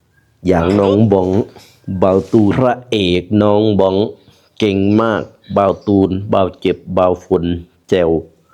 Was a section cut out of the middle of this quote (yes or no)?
yes